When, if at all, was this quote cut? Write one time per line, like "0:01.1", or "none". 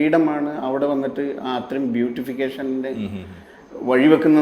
none